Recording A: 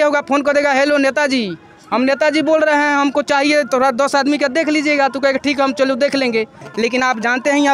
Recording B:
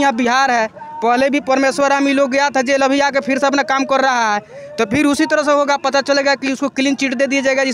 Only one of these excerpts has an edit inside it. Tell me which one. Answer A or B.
A